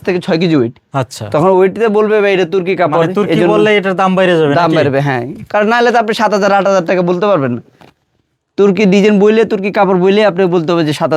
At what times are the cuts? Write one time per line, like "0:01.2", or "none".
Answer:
none